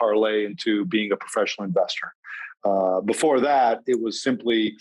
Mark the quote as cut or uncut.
uncut